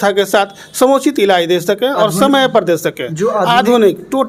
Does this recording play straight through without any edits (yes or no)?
yes